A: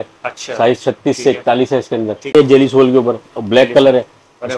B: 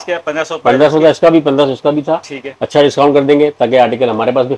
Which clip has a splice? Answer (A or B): A